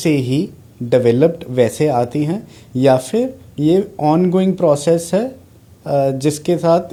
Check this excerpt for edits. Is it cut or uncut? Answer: uncut